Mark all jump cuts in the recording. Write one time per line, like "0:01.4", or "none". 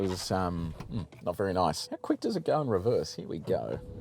0:01.8